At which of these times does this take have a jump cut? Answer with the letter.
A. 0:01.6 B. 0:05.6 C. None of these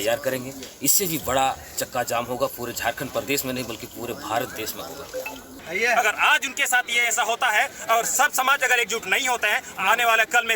B